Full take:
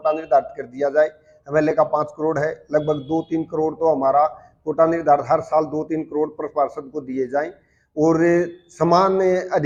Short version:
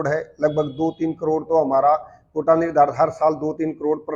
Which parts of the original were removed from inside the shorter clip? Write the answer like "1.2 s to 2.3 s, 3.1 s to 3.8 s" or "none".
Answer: none

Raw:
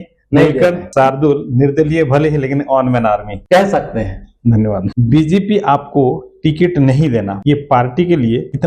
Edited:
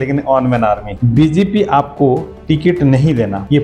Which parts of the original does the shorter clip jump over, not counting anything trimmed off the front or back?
3.4 s to 4.9 s

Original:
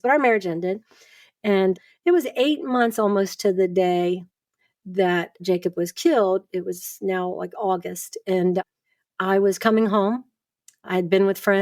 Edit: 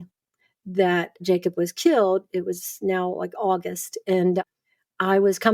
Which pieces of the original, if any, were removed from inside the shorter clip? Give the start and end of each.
none

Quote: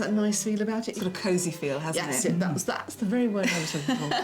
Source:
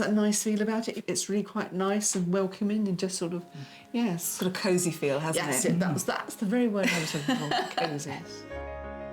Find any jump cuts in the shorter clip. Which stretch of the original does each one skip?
0.9 s to 4.3 s

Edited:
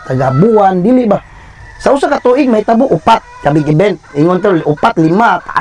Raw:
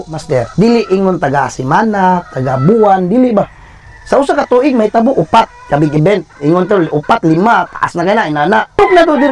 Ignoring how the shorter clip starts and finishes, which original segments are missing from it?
none

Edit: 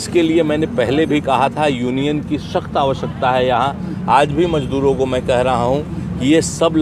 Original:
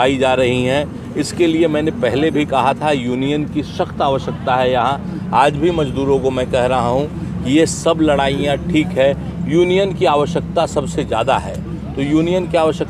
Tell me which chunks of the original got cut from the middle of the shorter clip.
none

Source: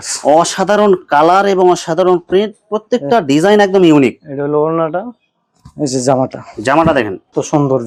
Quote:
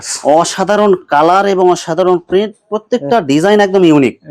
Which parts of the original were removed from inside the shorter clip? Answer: none

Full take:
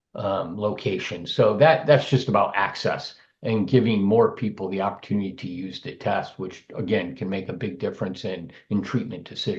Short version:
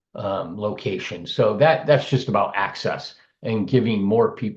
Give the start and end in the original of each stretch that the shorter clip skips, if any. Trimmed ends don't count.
none

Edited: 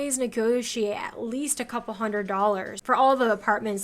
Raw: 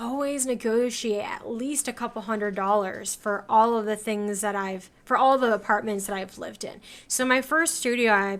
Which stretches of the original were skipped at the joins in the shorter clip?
3.0 s to 5.0 s

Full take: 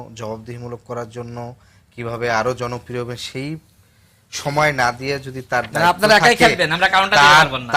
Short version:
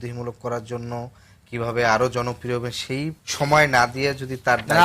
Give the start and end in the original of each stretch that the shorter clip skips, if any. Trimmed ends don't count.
3.7 s to 4.3 s

